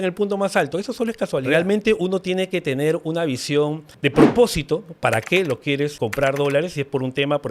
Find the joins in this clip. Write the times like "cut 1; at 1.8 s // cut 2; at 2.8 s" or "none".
cut 1; at 1.5 s // cut 2; at 3.9 s // cut 3; at 5.9 s